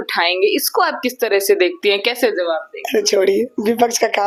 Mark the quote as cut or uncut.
uncut